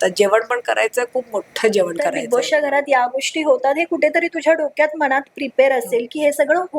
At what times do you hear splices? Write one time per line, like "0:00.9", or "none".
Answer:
0:02.2